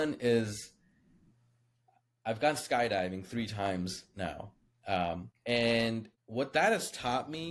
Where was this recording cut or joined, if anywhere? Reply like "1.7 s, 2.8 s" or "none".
5.3 s, 6.2 s

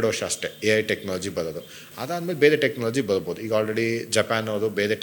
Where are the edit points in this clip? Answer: none

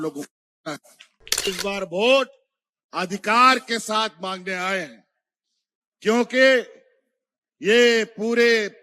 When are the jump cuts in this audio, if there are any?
1.5 s

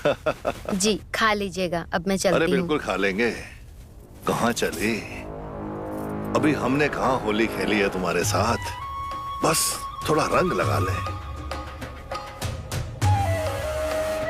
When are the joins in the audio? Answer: none

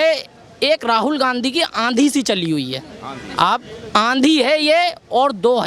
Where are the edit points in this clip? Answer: none

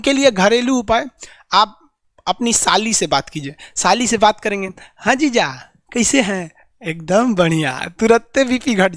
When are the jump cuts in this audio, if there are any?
none

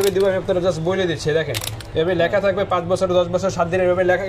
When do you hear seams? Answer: 1.8 s

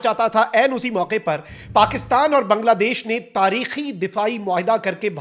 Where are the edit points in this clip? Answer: none

